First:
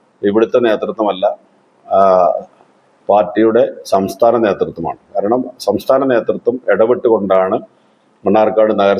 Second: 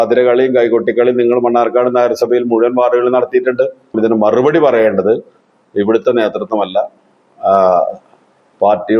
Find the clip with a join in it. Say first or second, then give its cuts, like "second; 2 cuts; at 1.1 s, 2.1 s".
second; 1 cut; at 4.0 s